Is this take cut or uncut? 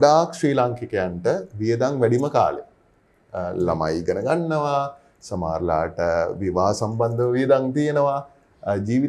uncut